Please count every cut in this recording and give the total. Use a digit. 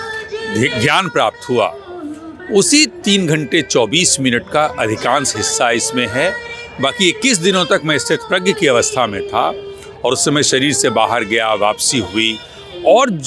0